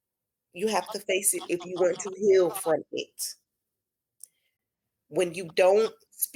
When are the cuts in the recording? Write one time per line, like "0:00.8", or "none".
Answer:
none